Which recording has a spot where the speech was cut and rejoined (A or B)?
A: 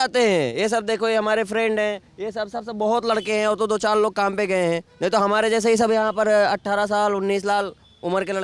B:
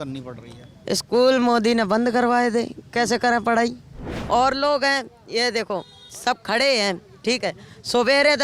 B